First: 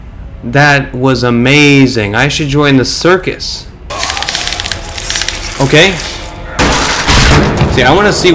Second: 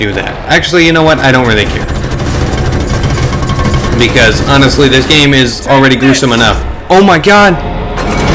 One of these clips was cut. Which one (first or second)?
first